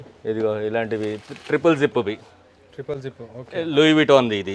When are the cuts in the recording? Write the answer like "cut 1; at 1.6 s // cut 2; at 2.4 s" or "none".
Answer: none